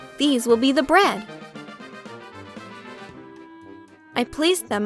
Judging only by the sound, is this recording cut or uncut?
uncut